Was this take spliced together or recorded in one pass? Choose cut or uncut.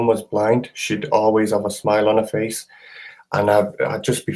uncut